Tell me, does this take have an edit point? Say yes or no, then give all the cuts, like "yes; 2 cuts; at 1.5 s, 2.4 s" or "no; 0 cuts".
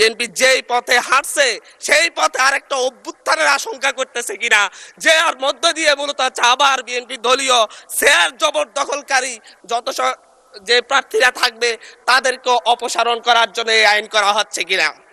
no; 0 cuts